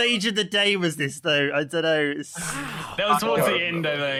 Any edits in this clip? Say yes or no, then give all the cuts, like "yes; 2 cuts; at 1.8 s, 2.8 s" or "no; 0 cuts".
no; 0 cuts